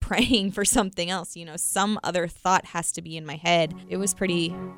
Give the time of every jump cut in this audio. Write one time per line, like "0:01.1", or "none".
0:03.8